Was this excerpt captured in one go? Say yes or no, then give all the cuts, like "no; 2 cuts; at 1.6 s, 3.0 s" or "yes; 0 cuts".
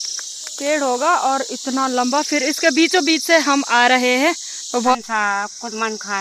no; 1 cut; at 4.9 s